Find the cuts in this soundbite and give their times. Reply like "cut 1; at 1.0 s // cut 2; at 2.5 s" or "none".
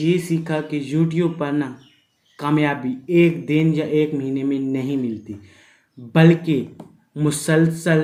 none